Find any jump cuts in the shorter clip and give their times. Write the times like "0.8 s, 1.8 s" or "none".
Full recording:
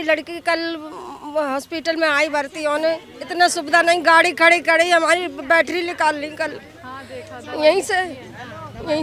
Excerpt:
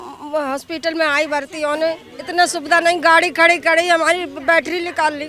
none